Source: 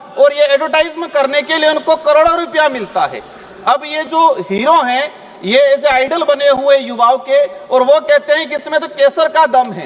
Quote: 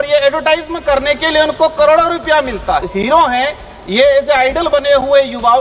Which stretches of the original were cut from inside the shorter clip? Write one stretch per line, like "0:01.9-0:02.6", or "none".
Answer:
0:03.1-0:04.4